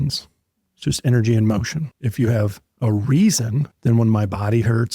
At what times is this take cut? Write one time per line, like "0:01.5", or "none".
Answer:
0:02.0
0:03.7